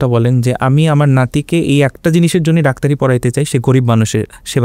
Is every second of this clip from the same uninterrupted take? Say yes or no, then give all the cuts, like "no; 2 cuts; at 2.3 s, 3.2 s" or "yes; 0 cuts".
yes; 0 cuts